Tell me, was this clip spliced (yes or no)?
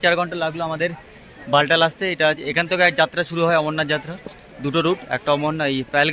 no